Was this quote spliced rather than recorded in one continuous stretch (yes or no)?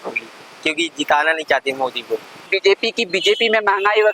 yes